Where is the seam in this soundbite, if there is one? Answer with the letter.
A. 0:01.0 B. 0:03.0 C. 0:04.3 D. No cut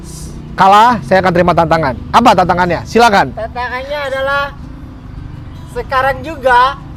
D